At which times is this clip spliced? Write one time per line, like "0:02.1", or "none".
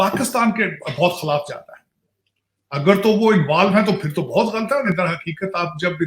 0:04.9